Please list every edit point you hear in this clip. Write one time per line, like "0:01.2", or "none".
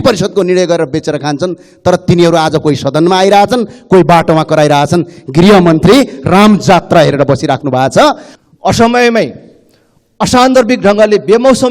0:08.3